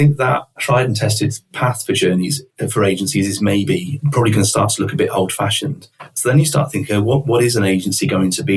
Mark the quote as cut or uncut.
uncut